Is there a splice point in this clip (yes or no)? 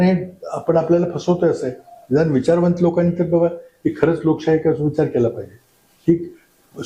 no